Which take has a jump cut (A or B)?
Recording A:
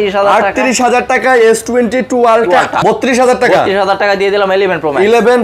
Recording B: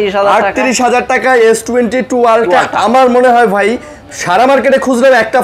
A